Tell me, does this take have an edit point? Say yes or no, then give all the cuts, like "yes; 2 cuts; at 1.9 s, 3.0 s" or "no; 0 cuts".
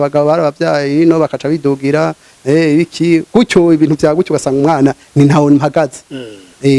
no; 0 cuts